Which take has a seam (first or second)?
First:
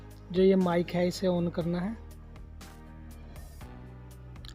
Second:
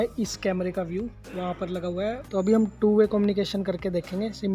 second